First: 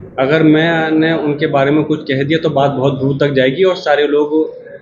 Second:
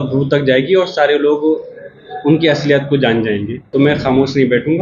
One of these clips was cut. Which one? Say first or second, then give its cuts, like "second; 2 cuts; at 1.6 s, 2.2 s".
second; 1 cut; at 3.6 s